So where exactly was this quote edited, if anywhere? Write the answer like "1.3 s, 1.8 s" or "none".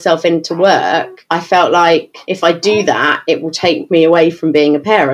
1.2 s, 2.2 s